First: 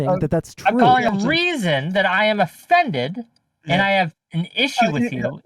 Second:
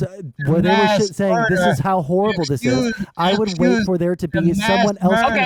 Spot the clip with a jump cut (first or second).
first